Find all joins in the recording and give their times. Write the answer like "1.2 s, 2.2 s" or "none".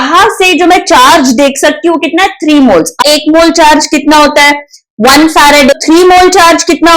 3.0 s, 5.7 s